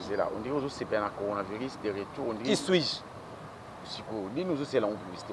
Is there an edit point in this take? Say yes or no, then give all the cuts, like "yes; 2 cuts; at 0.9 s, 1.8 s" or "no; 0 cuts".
no; 0 cuts